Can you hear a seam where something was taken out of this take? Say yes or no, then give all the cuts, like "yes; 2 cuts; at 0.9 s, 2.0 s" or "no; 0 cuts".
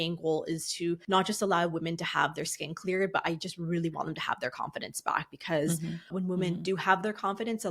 yes; 2 cuts; at 1.0 s, 6.1 s